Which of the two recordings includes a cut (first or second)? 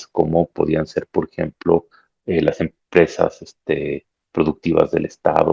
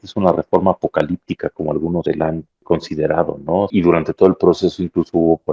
second